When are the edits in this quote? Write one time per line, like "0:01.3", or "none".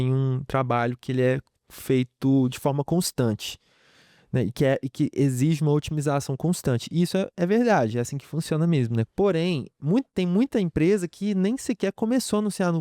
0:09.1